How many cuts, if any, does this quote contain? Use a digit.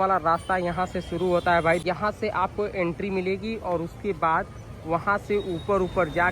1